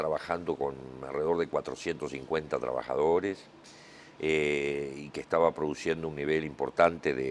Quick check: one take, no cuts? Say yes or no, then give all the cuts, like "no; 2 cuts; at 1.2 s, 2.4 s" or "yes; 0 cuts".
yes; 0 cuts